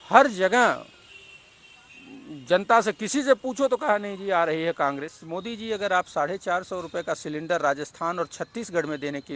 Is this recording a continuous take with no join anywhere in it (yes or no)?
no